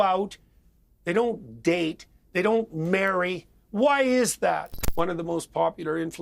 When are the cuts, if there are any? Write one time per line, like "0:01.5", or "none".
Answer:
0:04.8